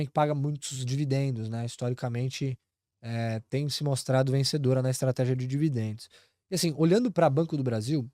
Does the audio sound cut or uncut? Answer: uncut